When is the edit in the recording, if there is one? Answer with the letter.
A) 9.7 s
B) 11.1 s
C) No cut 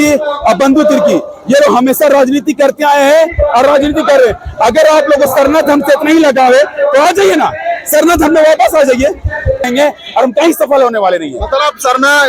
A